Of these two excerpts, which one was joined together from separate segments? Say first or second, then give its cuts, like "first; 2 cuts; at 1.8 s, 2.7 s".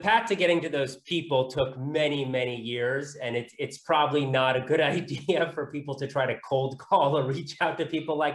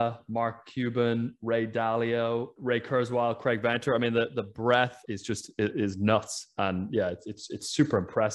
second; 2 cuts; at 2.5 s, 5.0 s